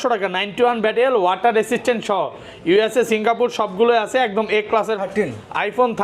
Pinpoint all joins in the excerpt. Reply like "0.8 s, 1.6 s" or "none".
5.0 s